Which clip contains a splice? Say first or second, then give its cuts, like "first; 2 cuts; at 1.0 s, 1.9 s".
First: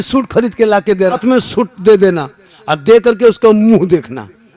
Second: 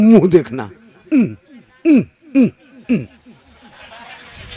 first; 1 cut; at 1.2 s